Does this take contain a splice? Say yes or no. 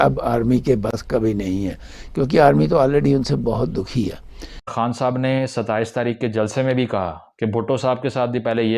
yes